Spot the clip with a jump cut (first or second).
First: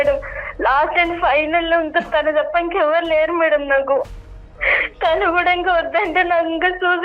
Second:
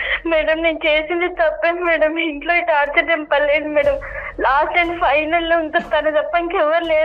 first